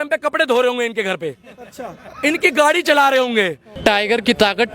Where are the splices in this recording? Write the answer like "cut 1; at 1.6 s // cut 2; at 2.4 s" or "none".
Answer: cut 1; at 3.6 s